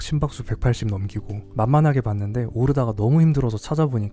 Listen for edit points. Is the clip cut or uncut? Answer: uncut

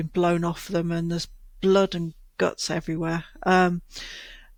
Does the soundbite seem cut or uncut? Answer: uncut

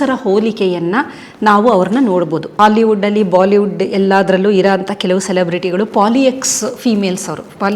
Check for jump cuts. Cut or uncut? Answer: cut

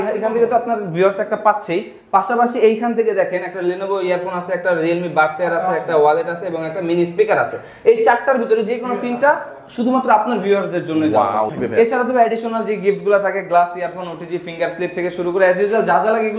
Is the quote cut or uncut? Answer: cut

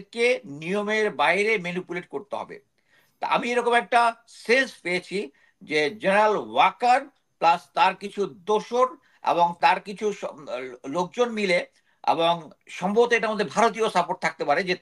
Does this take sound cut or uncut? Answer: uncut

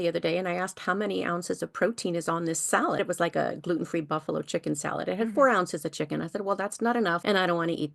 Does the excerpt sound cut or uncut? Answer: cut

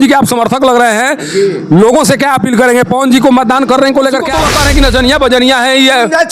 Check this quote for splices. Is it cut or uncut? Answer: cut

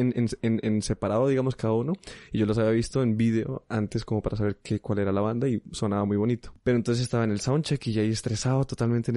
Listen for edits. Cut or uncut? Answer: cut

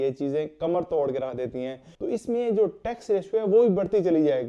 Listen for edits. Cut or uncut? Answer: cut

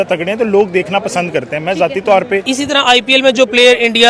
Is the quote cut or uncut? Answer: cut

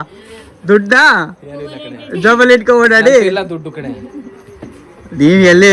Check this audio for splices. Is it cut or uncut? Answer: uncut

